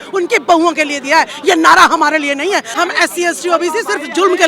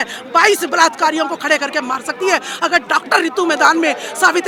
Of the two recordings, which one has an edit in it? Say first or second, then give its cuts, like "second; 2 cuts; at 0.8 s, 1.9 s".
first; 1 cut; at 2.7 s